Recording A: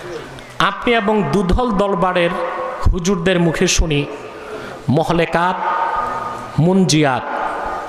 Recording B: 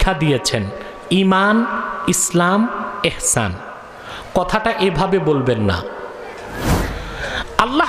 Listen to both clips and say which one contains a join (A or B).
B